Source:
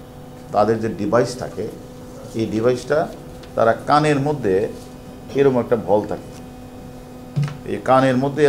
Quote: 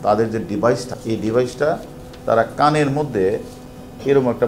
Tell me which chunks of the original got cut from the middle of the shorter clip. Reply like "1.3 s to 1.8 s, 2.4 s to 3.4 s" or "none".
1.4 s to 2.2 s